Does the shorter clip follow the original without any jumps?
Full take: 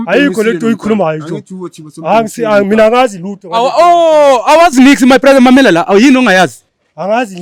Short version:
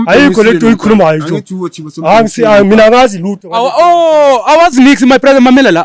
yes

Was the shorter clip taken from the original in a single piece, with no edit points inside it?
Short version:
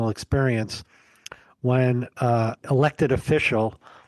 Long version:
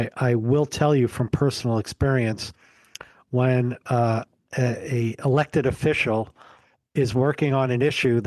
no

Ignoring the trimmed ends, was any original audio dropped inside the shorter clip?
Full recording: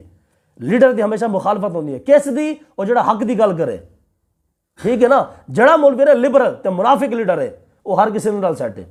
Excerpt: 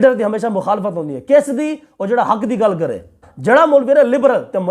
yes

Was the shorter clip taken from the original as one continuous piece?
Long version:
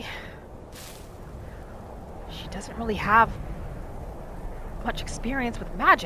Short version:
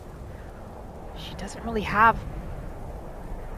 yes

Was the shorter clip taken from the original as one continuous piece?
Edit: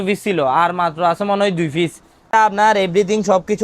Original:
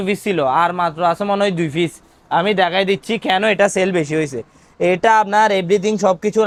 no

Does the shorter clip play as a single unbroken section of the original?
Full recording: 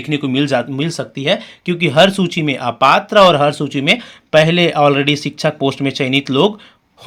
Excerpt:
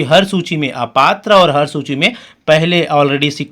yes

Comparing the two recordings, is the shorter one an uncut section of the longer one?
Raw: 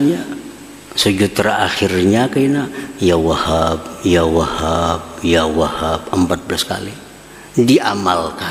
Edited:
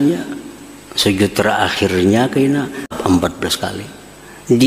no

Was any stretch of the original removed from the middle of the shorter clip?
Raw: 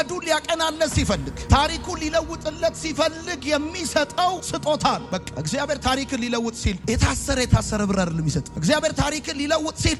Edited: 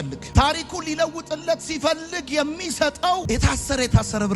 yes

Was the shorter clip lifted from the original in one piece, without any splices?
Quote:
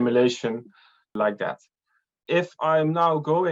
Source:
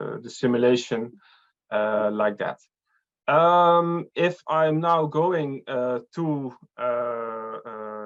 no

